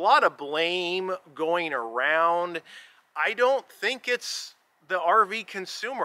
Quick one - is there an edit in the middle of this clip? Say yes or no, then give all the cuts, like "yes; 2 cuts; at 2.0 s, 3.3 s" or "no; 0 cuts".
no; 0 cuts